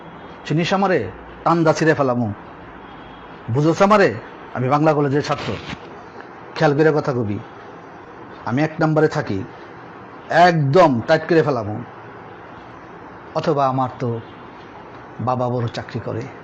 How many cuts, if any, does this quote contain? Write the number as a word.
zero